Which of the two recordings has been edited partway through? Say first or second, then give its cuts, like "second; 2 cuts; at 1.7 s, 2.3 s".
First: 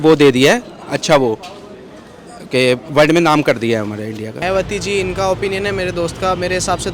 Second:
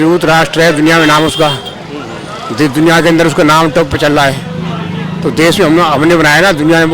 first; 1 cut; at 4.4 s